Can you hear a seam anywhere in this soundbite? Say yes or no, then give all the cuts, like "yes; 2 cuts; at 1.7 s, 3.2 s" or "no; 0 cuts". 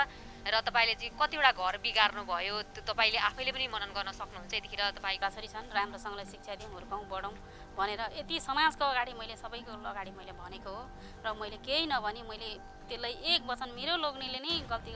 yes; 1 cut; at 5.2 s